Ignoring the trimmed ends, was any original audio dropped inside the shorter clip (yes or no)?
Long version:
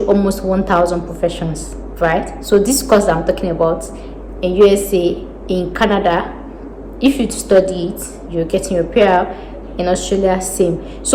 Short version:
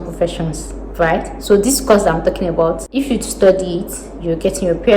yes